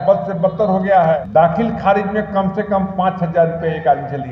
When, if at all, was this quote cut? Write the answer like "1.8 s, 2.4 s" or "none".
1.2 s